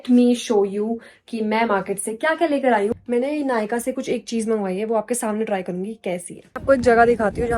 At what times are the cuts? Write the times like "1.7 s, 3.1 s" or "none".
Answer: 3.0 s, 6.5 s